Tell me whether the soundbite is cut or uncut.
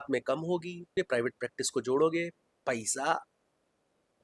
cut